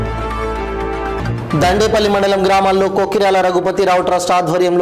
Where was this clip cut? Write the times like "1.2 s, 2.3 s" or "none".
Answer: 1.1 s